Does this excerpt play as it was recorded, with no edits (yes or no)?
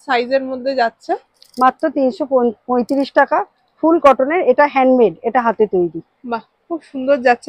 yes